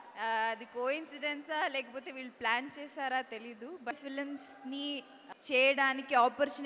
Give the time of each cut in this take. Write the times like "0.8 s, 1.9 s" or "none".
3.9 s, 5.2 s